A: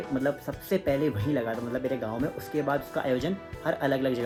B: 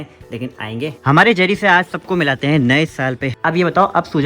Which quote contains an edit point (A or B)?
B